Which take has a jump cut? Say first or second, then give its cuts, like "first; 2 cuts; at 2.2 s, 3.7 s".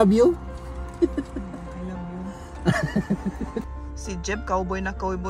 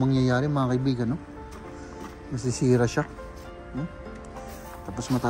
first; 1 cut; at 3.9 s